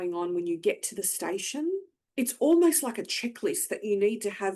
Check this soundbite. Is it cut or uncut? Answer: cut